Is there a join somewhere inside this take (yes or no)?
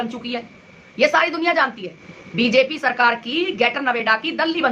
no